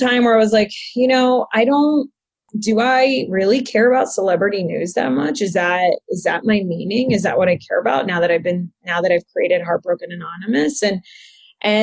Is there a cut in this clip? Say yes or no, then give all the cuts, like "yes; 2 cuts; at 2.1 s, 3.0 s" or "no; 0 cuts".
yes; 1 cut; at 2.5 s